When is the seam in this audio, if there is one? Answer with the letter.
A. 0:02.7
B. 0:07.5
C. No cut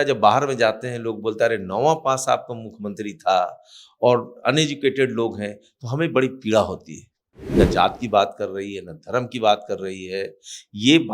B